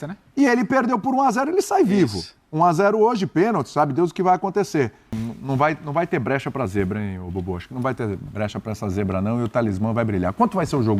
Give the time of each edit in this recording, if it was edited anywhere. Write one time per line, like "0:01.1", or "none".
0:05.2